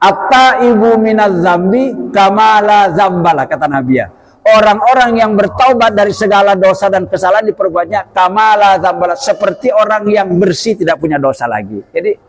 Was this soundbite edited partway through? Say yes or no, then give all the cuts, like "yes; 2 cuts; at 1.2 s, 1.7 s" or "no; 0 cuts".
no; 0 cuts